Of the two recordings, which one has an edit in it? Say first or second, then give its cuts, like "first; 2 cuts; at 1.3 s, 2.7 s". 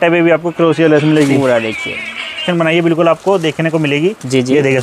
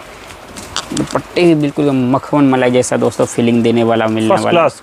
first; 1 cut; at 2.4 s